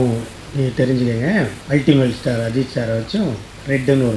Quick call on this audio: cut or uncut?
uncut